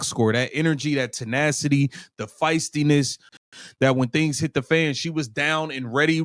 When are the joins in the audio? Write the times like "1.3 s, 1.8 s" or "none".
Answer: 3.4 s

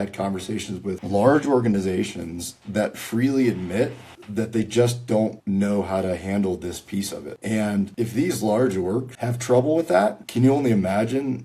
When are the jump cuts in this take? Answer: 0.9 s

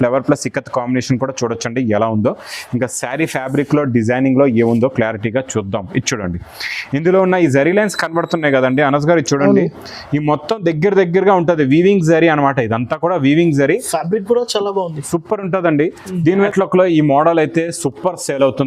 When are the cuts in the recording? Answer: 16.5 s

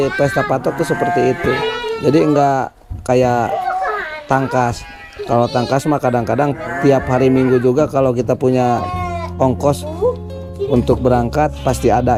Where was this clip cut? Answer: none

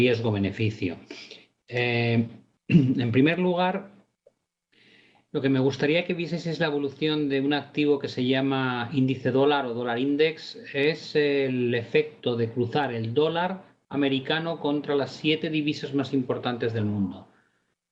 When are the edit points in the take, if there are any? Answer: 12.7 s

